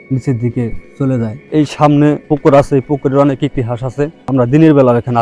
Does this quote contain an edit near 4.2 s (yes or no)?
yes